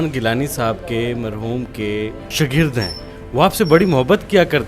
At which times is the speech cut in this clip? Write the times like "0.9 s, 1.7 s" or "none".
2.2 s